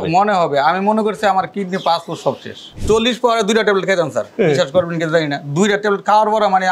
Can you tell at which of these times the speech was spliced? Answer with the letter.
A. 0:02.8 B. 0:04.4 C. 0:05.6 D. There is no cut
A